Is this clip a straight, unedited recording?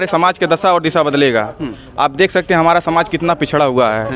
yes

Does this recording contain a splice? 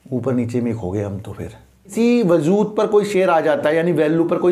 yes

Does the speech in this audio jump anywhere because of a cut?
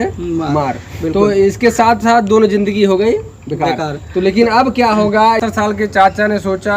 yes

